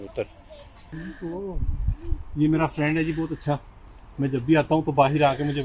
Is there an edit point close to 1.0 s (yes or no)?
yes